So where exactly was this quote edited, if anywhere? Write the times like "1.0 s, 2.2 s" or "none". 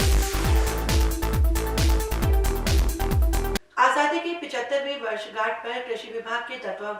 3.5 s